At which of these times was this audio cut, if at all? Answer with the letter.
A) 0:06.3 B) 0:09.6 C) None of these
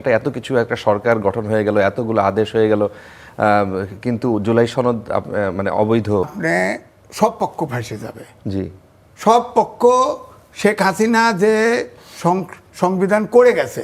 A